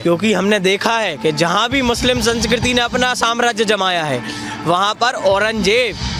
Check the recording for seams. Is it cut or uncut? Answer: uncut